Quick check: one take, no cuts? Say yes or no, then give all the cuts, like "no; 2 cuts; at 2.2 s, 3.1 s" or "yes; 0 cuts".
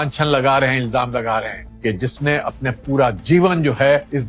yes; 0 cuts